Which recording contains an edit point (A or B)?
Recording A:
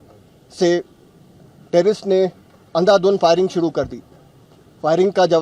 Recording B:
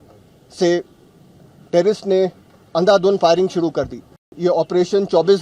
B